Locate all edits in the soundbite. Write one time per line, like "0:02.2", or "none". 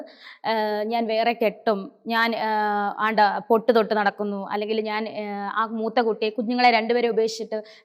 none

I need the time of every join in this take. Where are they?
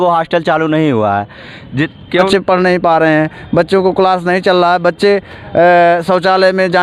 0:02.3

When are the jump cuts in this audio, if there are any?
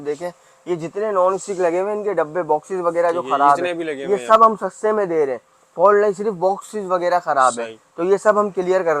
none

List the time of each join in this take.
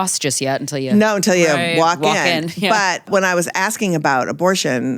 0:03.1

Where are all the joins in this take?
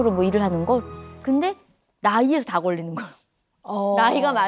0:00.9

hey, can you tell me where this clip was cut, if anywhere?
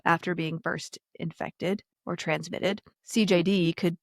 0:01.9
0:02.9

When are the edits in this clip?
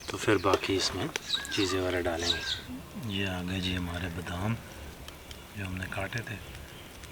0:02.5

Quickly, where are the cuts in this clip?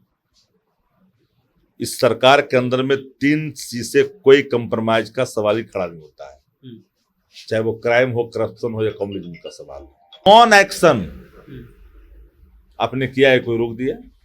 0:10.3

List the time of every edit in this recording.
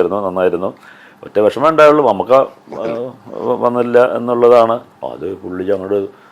0:04.8

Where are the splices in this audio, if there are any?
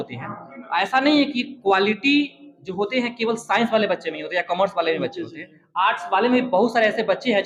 none

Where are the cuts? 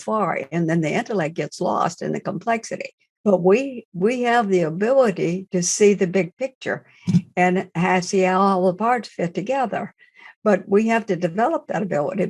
0:03.2

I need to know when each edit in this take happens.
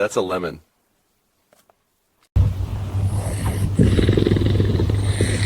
0:02.3

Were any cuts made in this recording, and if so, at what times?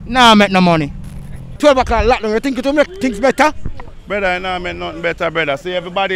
0:01.6

